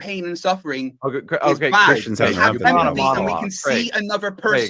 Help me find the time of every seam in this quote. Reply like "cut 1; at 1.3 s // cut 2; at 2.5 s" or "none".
none